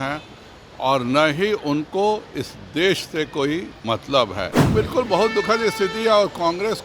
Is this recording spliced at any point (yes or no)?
yes